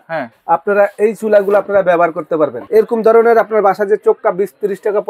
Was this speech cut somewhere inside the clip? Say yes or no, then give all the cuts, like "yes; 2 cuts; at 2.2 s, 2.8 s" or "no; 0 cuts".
yes; 1 cut; at 2.6 s